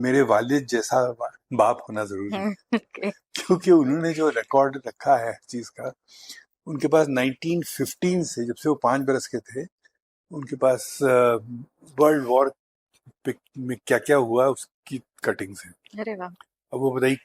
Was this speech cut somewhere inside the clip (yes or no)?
no